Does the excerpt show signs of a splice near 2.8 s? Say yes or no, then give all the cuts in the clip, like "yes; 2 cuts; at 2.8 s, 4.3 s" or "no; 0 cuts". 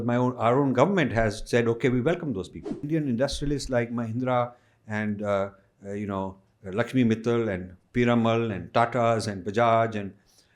yes; 1 cut; at 2.8 s